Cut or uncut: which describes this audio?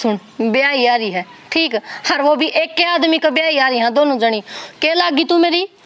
uncut